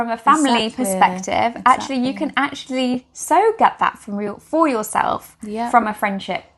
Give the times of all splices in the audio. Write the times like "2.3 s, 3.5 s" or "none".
none